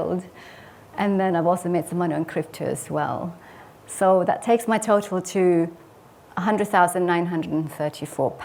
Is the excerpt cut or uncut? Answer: uncut